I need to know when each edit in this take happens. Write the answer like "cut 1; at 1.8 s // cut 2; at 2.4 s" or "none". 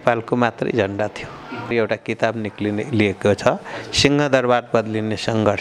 cut 1; at 1.7 s

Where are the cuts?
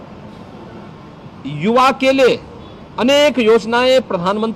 none

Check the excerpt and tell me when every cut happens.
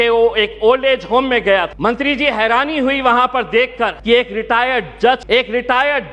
cut 1; at 1.7 s // cut 2; at 4.0 s // cut 3; at 5.2 s

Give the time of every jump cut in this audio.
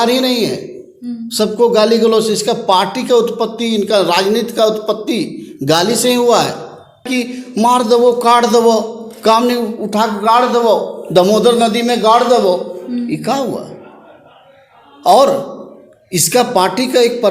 cut 1; at 7.1 s

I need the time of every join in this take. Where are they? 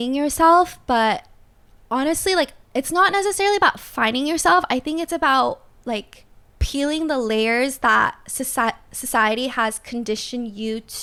none

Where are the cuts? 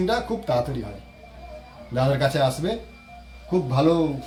none

